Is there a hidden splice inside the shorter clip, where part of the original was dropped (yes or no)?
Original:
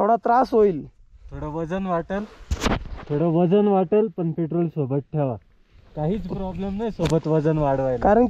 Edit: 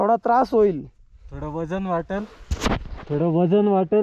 no